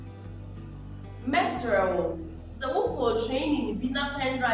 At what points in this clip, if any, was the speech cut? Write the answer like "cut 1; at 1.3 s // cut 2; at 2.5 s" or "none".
cut 1; at 1.2 s